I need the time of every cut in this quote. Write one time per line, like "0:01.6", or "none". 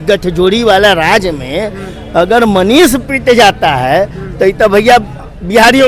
none